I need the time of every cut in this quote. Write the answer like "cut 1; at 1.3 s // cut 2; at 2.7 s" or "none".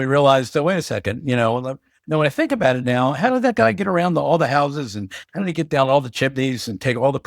none